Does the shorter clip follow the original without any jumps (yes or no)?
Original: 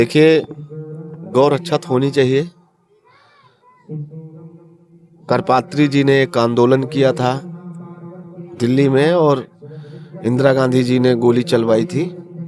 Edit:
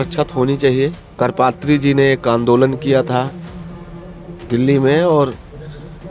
no